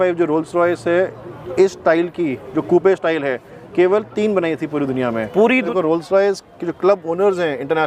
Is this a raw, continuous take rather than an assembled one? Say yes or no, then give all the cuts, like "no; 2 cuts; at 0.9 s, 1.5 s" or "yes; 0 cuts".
no; 1 cut; at 5.7 s